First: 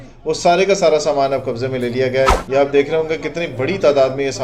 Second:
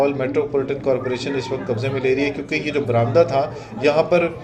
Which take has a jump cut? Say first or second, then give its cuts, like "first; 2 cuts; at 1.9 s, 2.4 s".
first; 1 cut; at 2.3 s